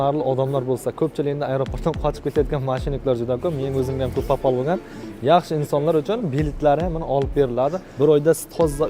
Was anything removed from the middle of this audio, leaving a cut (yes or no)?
yes